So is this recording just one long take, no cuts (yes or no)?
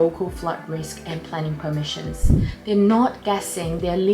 no